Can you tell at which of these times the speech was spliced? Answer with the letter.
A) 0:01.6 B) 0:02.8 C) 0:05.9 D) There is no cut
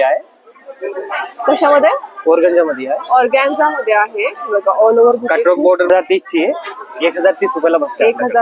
C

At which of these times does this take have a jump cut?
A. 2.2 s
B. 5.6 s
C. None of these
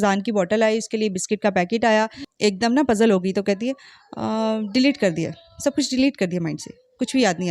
A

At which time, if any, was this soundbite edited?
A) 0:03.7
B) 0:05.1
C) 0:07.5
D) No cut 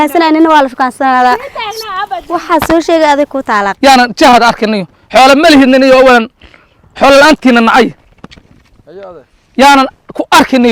A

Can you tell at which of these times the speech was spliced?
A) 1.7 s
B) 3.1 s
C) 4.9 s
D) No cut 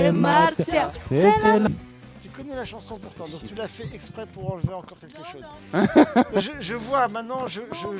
A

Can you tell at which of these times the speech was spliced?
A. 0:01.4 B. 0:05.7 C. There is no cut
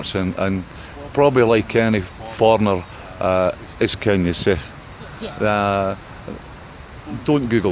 C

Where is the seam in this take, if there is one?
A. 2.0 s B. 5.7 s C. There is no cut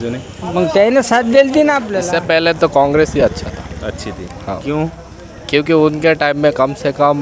A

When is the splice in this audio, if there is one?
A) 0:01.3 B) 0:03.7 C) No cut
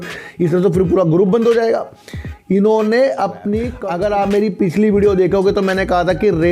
B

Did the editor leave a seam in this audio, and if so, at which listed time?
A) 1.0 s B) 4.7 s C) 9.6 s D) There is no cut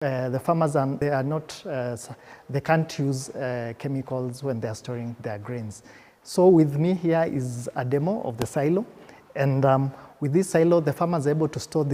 A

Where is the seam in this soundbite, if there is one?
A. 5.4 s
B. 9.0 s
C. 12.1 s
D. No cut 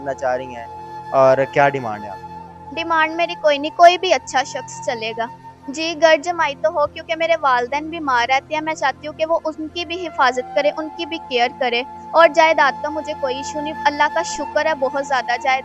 A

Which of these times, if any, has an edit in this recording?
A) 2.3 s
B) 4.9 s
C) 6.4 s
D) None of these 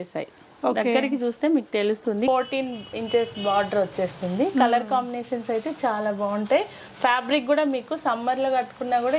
A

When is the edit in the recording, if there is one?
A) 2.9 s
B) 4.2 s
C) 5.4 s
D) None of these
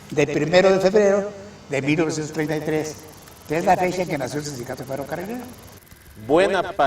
C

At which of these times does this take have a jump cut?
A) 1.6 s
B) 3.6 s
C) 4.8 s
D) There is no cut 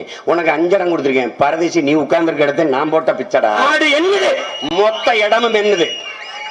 B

